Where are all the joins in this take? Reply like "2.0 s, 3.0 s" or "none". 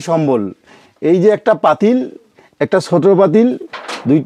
none